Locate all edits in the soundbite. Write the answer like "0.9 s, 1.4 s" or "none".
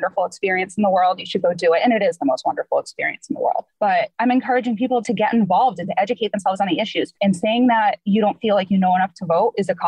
3.9 s, 5.0 s, 7.1 s, 8.0 s

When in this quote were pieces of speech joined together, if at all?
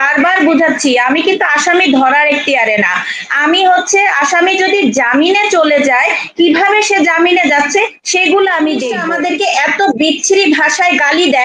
9.0 s

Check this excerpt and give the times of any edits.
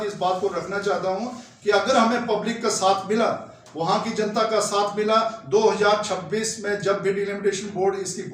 none

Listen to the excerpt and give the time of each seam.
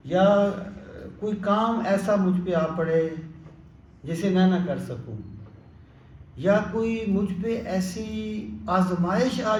none

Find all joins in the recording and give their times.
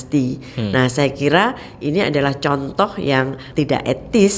3.4 s

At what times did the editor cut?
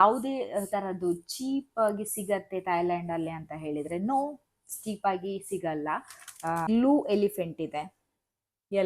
6.7 s

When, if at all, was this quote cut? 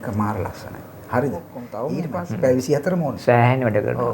2.0 s

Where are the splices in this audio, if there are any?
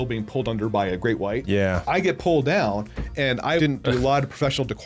1.4 s, 3.7 s

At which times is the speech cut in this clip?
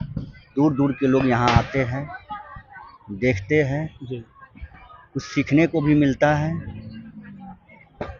none

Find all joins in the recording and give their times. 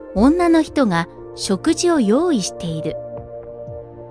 2.9 s

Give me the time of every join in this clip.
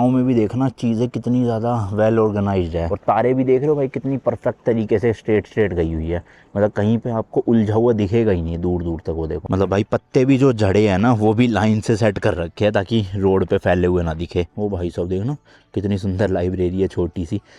2.9 s, 9.4 s, 14.5 s

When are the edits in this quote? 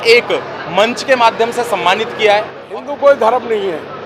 2.6 s

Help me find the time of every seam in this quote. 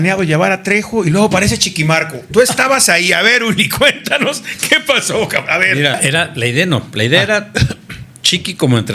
6.0 s

